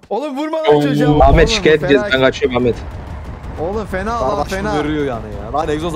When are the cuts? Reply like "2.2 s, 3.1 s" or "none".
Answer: 1.2 s